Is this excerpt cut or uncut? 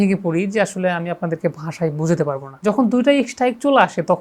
cut